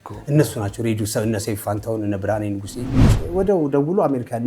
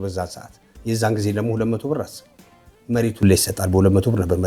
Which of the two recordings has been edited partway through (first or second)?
first